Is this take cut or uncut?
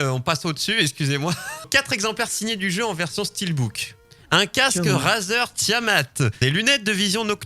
cut